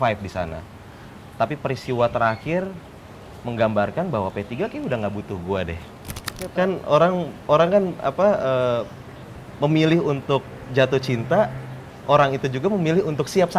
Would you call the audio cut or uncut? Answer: cut